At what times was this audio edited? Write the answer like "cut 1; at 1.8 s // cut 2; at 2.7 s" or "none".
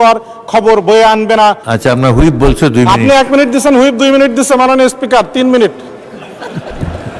cut 1; at 1.7 s